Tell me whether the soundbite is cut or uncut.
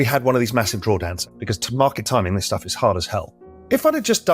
cut